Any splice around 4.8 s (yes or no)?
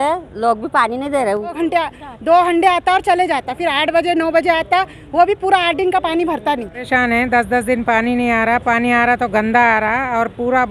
no